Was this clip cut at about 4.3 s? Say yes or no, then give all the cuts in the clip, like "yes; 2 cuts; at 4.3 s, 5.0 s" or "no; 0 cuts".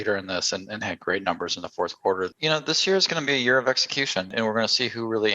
yes; 2 cuts; at 2.3 s, 4.3 s